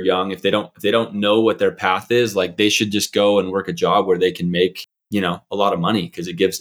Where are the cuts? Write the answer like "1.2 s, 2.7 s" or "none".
none